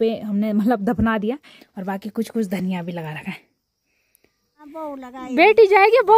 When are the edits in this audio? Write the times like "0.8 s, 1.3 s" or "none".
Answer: 1.5 s, 4.6 s